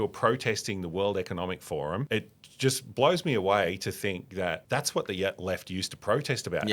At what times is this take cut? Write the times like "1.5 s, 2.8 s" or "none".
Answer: 2.1 s, 4.6 s